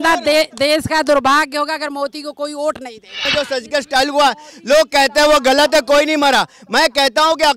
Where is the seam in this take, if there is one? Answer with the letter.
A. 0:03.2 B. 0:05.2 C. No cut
A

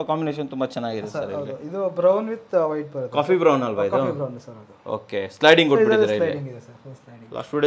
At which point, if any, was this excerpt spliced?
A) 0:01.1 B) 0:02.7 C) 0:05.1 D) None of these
D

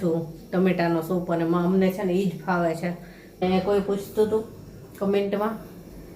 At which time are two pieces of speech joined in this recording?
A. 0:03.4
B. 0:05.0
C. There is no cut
A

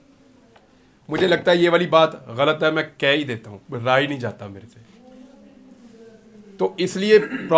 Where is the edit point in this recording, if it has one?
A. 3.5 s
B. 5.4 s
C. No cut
C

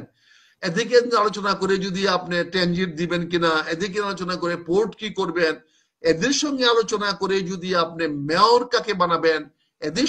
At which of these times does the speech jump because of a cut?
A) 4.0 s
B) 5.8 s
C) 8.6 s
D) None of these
D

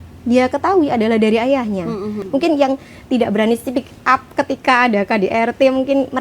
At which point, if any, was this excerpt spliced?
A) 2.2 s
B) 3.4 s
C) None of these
A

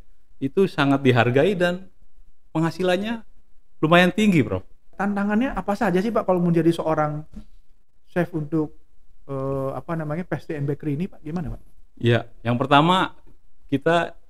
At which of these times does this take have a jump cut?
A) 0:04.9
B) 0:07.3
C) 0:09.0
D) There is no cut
A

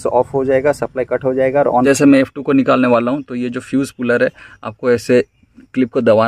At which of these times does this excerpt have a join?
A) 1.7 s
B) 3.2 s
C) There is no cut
A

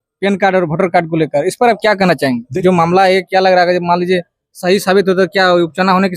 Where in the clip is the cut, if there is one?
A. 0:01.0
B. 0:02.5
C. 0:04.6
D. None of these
B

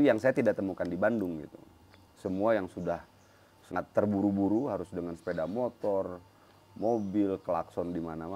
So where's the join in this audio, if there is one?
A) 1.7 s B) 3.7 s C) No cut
B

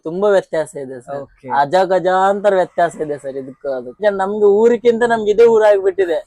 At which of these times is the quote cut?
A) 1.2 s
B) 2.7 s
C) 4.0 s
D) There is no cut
C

